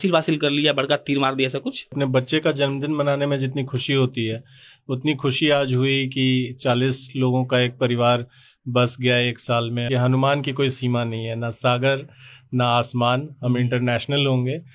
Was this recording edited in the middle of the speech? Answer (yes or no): yes